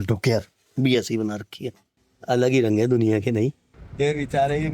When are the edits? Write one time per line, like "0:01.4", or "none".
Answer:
0:03.6